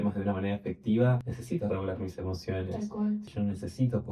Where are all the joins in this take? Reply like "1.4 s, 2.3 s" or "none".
1.3 s, 3.3 s